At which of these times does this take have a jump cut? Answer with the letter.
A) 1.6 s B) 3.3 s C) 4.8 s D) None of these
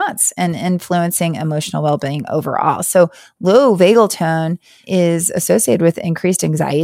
C